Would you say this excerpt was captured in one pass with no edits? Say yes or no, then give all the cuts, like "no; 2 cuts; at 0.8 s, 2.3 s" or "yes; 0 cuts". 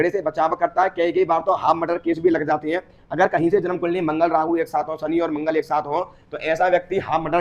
yes; 0 cuts